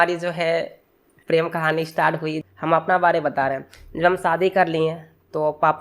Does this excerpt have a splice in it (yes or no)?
yes